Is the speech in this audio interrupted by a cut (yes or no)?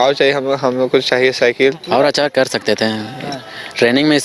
yes